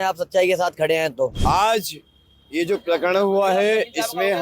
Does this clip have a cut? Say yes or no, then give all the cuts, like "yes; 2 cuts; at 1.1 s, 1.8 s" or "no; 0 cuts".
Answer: yes; 1 cut; at 1.4 s